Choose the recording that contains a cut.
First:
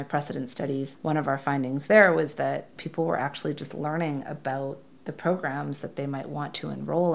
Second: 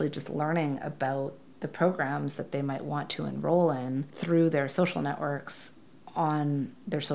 first; 1 cut; at 0.9 s

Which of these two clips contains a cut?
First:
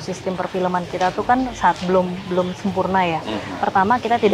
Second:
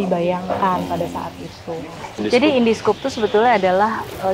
second; 1 cut; at 2.2 s

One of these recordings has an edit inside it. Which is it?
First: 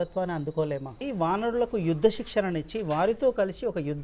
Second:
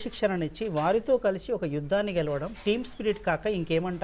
first; 1 cut; at 1.0 s

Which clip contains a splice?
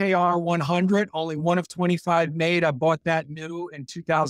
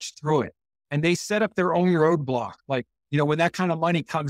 second; 1 cut; at 3.0 s

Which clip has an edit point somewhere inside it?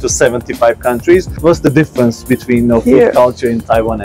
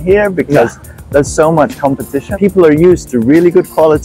second; 1 cut; at 2.2 s

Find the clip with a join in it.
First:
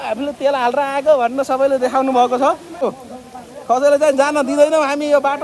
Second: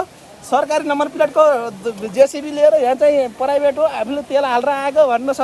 first; 1 cut; at 2.8 s

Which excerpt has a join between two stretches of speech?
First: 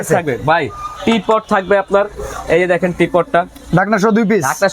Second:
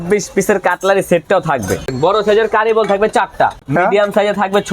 second; 2 cuts; at 1.9 s, 3.6 s

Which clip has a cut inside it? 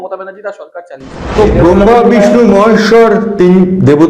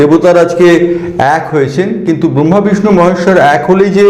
first; 1 cut; at 1.3 s

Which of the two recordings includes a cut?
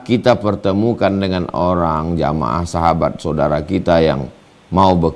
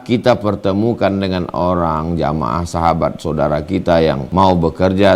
second; 1 cut; at 4.2 s

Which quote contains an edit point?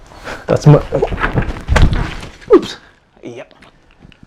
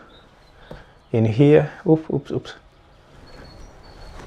second; 1 cut; at 3.1 s

